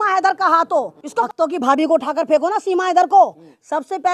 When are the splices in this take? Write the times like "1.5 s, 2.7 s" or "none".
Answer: 1.2 s